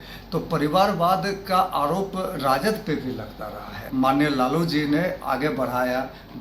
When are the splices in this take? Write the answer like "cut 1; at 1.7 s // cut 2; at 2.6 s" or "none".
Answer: cut 1; at 3.9 s